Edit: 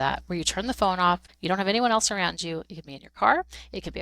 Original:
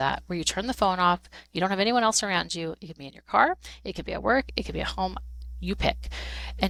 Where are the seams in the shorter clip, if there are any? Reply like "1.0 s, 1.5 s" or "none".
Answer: 1.3 s